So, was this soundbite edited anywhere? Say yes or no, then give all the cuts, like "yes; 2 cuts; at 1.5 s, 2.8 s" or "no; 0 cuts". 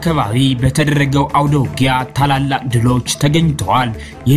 no; 0 cuts